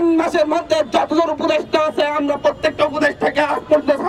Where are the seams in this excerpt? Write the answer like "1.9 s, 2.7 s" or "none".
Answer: none